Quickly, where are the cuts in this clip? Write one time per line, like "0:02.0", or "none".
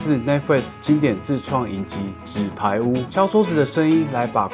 0:03.1